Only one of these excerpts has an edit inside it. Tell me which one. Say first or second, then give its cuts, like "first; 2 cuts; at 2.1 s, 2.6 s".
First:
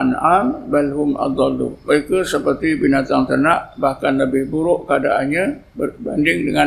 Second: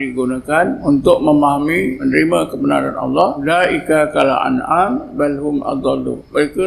second; 3 cuts; at 0.8 s, 2.0 s, 3.4 s